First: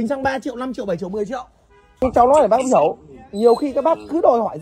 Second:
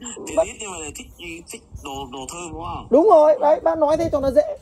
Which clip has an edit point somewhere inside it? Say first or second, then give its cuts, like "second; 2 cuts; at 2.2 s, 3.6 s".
first; 1 cut; at 2.0 s